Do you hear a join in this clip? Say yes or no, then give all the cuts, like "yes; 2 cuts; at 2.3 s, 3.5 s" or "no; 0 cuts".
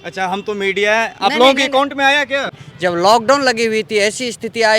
yes; 1 cut; at 2.5 s